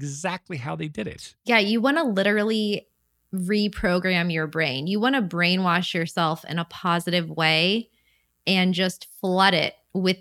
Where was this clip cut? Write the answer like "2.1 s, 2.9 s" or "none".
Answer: none